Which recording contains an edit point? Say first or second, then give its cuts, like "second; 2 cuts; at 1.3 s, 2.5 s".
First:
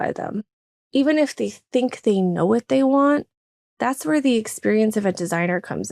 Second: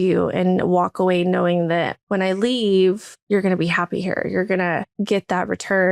second; 3 cuts; at 2.0 s, 3.1 s, 4.9 s